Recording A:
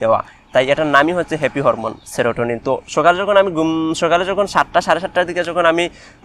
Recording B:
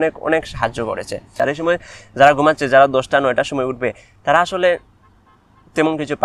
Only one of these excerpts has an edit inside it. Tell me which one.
B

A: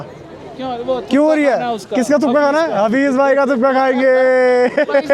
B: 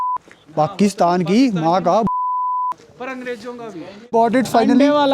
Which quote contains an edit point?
B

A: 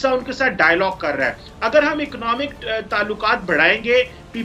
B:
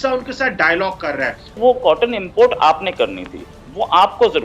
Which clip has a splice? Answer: B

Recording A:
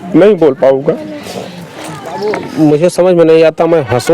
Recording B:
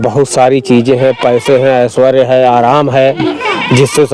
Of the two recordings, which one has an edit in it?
A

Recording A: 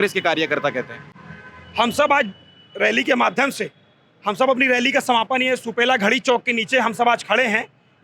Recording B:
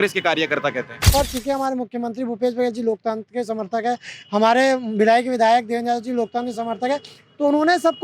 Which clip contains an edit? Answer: B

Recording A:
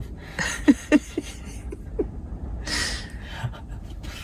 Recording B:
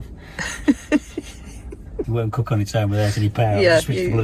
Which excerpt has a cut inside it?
B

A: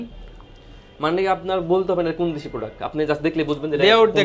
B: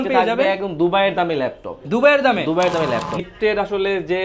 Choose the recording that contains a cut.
B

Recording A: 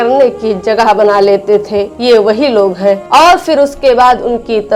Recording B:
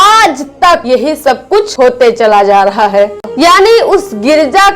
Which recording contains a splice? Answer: B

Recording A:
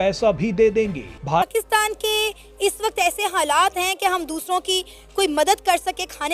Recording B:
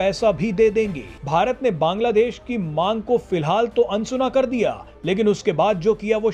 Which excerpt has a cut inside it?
A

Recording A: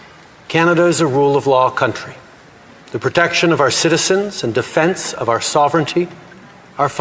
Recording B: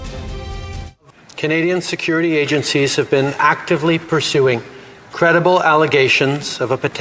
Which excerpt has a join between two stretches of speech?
B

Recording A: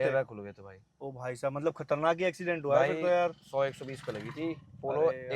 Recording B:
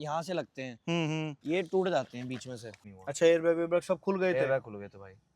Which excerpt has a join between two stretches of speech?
B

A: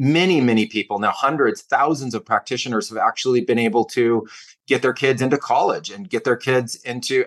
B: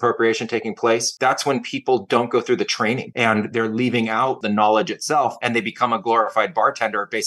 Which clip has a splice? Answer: B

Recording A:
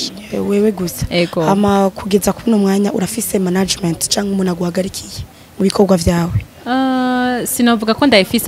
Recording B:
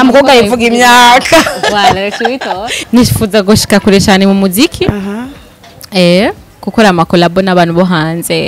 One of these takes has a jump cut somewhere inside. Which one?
B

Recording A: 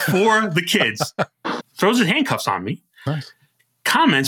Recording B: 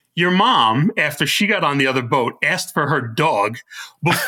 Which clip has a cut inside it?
A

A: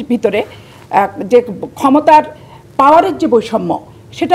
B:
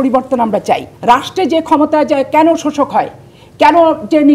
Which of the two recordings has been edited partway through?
B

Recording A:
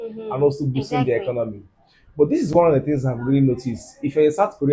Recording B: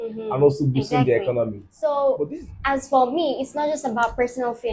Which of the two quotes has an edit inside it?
B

